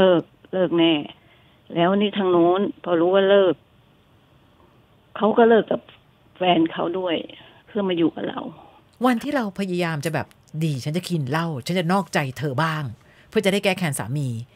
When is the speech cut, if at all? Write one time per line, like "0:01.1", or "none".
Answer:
none